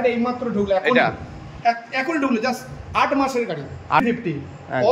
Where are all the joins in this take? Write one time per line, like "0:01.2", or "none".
0:04.0